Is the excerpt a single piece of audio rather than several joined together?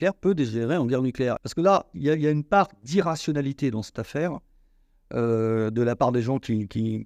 no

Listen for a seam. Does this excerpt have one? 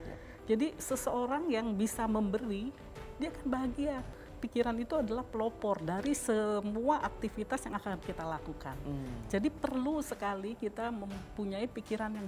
yes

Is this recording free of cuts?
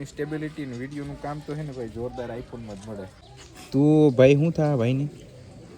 no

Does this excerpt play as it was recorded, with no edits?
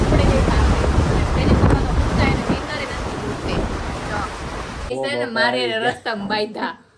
no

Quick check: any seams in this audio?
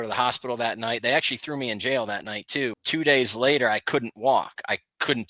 yes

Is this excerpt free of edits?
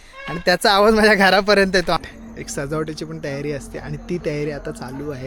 no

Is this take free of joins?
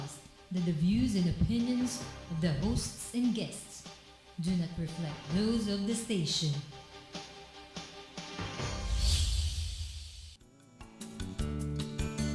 yes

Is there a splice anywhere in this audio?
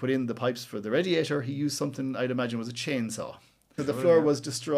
yes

